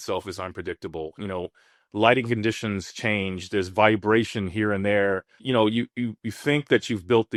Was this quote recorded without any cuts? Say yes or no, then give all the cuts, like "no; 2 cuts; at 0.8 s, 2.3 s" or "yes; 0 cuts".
yes; 0 cuts